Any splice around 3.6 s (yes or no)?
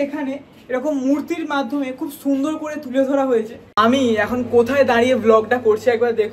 yes